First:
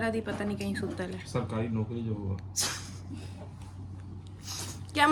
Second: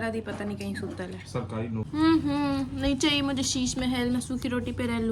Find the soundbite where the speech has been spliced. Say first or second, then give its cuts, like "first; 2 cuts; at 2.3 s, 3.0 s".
second; 1 cut; at 1.9 s